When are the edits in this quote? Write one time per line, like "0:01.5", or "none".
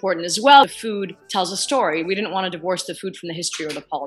none